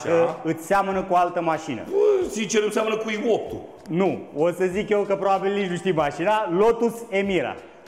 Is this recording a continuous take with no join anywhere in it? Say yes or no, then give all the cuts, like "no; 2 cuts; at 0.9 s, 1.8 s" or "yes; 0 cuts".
yes; 0 cuts